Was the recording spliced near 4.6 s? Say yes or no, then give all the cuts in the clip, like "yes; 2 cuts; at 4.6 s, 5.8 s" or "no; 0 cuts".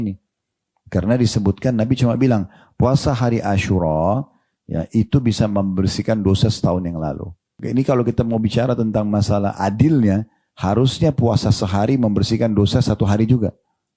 no; 1 cut; at 7.6 s